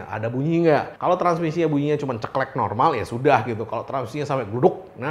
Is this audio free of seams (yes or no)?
yes